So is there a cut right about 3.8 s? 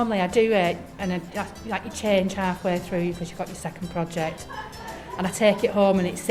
no; 0 cuts

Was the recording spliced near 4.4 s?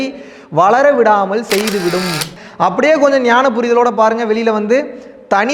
no; 1 cut; at 2.3 s

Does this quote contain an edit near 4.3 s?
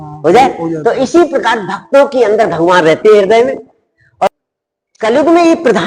yes; 1 cut; at 4.3 s

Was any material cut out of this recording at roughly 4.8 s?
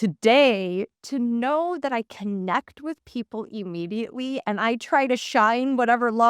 no; 1 cut; at 0.9 s

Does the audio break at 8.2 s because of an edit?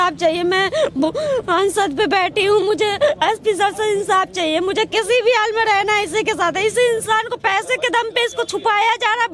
no; 0 cuts

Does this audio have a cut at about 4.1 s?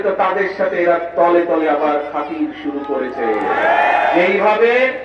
yes; 1 cut; at 4.1 s

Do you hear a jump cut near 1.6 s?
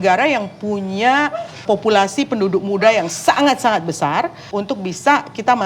yes; 2 cuts; at 1.6 s, 4.4 s

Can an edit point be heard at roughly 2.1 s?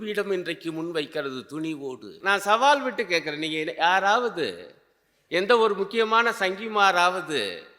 yes; 1 cut; at 2.1 s

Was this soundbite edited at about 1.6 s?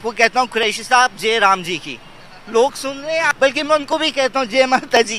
no; 1 cut; at 3.3 s

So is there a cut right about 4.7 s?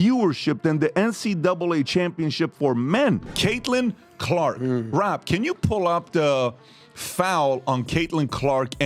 no; 1 cut; at 3.2 s

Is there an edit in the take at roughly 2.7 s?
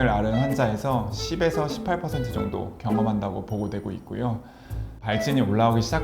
no; 1 cut; at 4.9 s

